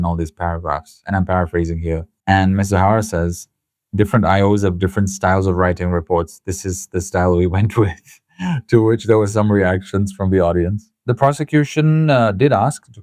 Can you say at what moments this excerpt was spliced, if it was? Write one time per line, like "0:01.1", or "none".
0:02.1
0:10.9